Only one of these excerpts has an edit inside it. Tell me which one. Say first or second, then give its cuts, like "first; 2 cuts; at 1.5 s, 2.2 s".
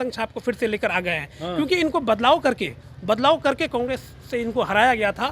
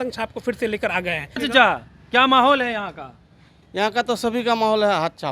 second; 1 cut; at 1.4 s